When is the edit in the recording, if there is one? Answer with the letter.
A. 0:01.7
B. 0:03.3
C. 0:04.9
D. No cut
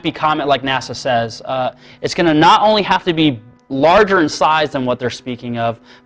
A